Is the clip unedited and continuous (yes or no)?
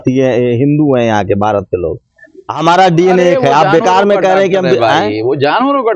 yes